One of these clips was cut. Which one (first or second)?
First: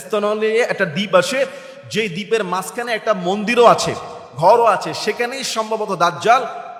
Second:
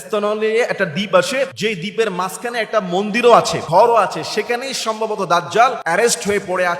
second